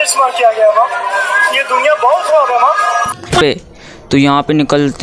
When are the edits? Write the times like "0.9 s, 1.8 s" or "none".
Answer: 3.4 s